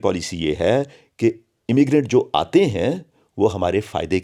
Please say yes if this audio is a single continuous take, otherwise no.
yes